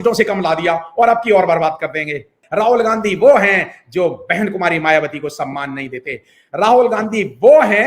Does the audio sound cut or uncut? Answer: cut